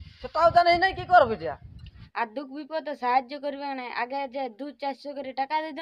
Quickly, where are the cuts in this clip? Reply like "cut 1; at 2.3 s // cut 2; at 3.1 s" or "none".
cut 1; at 2.0 s